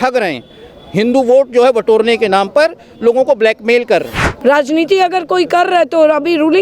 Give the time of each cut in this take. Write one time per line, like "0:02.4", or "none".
0:04.2